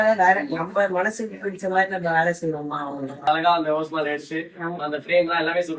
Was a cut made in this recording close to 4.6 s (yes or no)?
no